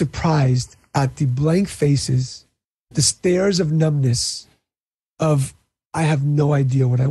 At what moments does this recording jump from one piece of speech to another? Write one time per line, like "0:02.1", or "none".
0:02.8